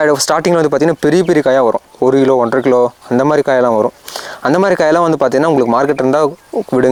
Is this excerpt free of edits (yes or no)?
yes